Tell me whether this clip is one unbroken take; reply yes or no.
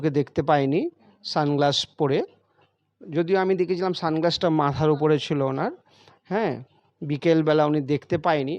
yes